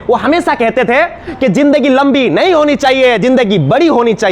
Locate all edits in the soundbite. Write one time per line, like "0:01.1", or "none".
none